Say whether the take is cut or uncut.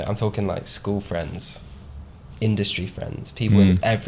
uncut